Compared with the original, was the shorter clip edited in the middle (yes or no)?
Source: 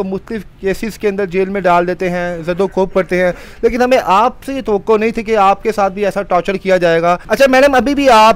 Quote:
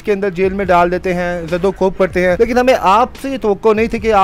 yes